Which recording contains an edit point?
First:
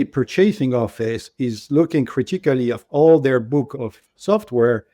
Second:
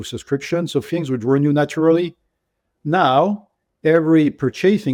first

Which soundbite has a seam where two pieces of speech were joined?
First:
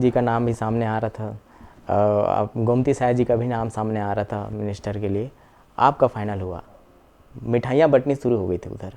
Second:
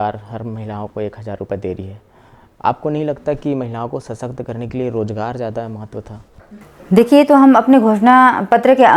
second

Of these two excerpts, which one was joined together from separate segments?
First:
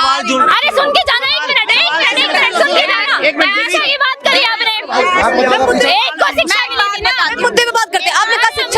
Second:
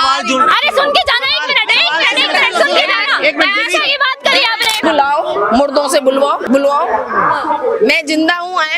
second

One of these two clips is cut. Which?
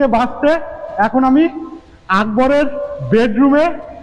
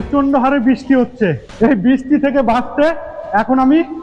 second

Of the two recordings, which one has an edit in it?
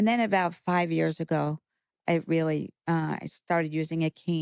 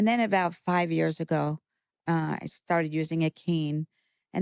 second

